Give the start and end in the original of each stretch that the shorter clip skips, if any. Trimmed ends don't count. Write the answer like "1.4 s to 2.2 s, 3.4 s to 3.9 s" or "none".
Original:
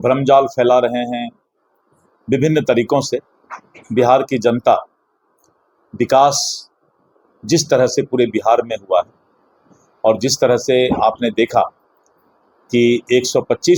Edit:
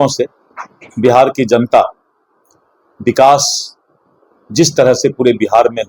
none